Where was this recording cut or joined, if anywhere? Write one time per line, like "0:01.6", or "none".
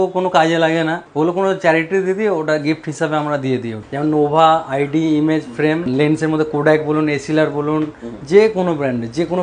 0:01.0
0:03.8
0:05.9